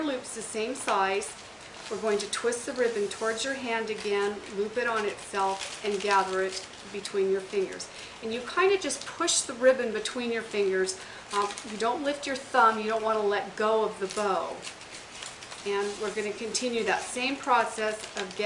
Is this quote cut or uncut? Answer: cut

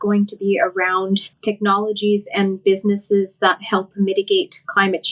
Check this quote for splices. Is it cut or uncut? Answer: cut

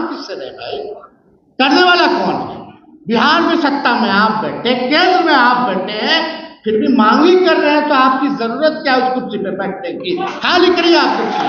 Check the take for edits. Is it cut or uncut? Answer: uncut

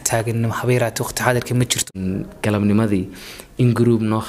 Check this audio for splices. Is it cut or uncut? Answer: cut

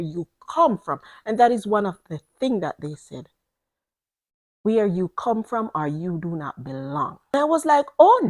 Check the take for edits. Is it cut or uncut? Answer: cut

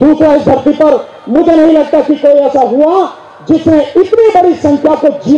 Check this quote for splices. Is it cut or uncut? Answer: uncut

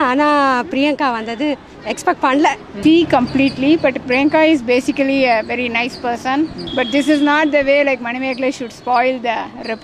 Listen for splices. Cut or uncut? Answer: cut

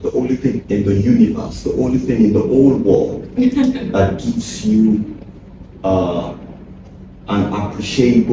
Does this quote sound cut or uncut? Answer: uncut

